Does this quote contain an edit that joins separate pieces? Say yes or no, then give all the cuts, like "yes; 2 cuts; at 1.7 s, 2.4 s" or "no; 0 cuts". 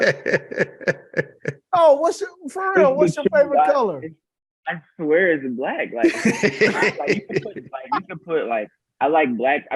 no; 0 cuts